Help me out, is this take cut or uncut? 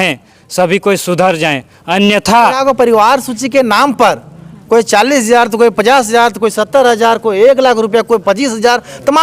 cut